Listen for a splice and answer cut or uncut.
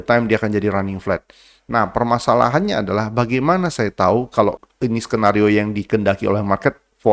uncut